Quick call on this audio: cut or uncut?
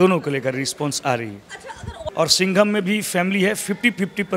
cut